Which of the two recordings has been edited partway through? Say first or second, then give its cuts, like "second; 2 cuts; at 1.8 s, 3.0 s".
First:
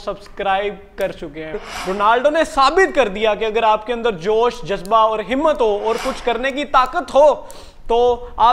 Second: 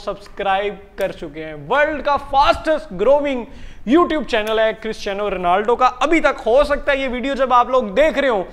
first; 1 cut; at 1.6 s